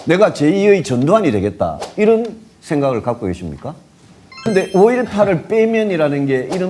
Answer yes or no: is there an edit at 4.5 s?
yes